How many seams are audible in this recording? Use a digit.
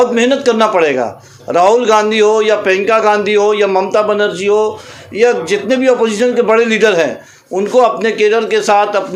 0